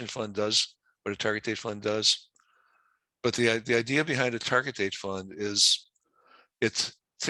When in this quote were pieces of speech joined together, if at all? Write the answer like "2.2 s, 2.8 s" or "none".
none

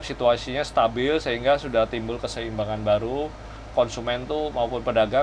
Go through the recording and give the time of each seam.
3.7 s

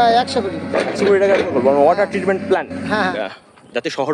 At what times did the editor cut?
3.1 s

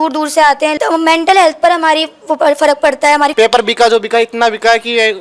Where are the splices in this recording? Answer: 0.7 s, 3.3 s

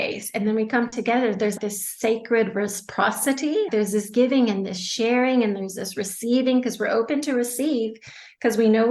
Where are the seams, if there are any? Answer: 1.6 s, 3.7 s

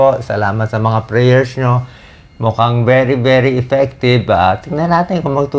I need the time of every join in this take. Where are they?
none

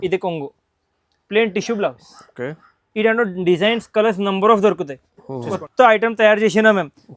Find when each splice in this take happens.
5.6 s

